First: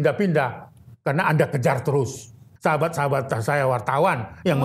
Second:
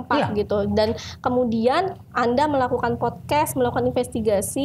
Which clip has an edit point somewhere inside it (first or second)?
first